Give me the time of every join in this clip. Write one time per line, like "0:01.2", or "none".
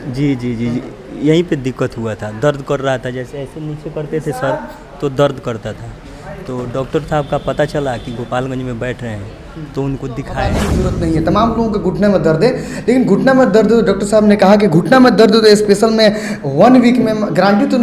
0:10.7